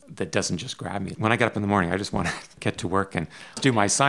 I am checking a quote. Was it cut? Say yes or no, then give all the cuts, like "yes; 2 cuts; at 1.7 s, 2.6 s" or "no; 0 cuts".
yes; 2 cuts; at 1.1 s, 2.5 s